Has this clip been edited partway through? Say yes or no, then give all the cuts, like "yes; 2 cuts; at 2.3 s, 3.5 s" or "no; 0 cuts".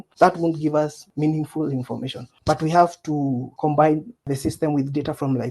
yes; 2 cuts; at 3.5 s, 4.2 s